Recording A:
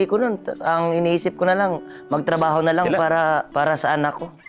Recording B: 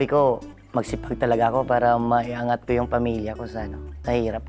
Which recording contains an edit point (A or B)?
A